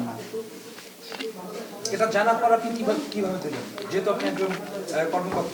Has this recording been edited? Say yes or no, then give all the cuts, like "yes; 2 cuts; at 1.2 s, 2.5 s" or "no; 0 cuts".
no; 0 cuts